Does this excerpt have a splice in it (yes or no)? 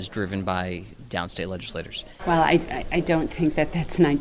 yes